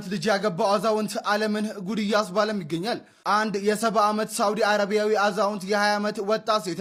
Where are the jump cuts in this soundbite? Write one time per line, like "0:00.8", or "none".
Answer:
none